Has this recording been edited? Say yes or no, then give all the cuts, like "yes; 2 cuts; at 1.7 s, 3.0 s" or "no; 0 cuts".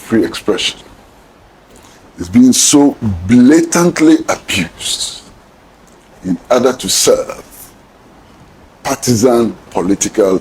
no; 0 cuts